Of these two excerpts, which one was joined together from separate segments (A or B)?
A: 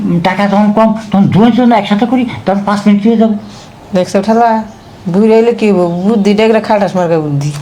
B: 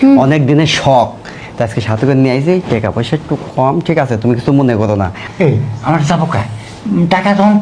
B